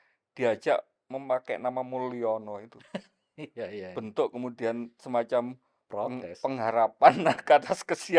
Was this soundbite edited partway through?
no; 0 cuts

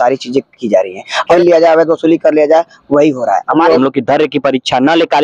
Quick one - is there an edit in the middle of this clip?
yes; 2 cuts; at 1.3 s, 3.8 s

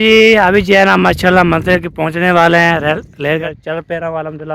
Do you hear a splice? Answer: yes; 1 cut; at 3.4 s

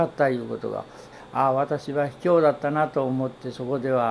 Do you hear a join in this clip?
yes; 1 cut; at 1.1 s

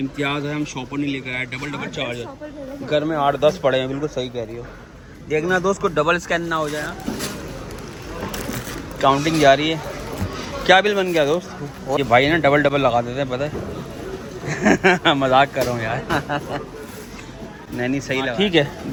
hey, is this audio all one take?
yes; 0 cuts

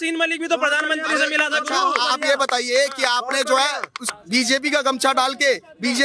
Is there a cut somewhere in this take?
yes; 1 cut; at 4.0 s

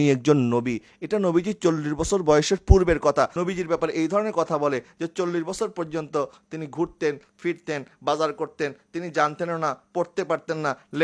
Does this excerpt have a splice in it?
yes; 1 cut; at 3.4 s

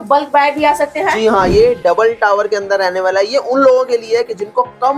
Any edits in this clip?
yes; 1 cut; at 1.5 s

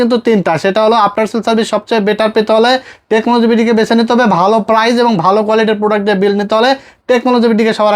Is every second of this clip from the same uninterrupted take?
yes; 0 cuts

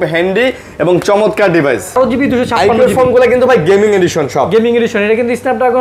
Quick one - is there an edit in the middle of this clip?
yes; 1 cut; at 1.9 s

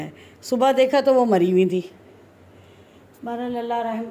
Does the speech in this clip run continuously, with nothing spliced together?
yes; 0 cuts

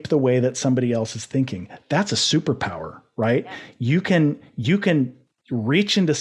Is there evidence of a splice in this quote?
no; 0 cuts

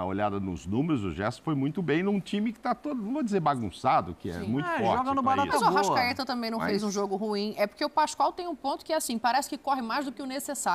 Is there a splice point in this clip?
no; 0 cuts

